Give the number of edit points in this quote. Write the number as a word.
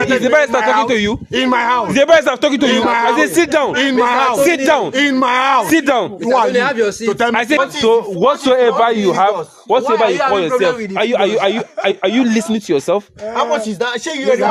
one